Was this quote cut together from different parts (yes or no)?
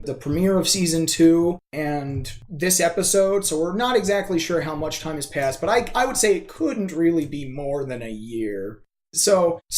no